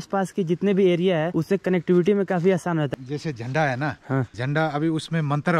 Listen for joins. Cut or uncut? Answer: cut